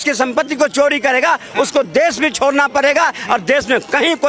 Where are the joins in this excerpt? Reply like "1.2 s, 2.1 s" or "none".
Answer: none